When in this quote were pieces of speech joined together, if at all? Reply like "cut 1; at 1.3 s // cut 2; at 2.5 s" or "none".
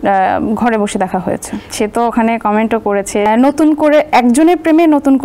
cut 1; at 1.7 s // cut 2; at 3.3 s